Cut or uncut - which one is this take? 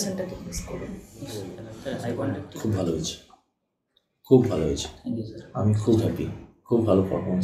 cut